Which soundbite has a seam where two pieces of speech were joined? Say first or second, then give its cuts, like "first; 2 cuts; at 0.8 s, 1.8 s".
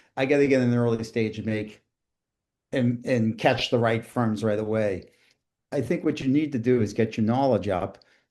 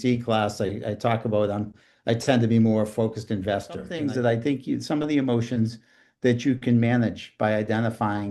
second; 1 cut; at 3.9 s